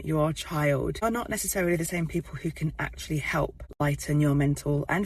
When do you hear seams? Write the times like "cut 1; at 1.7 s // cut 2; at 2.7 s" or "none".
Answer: cut 1; at 1.0 s // cut 2; at 3.6 s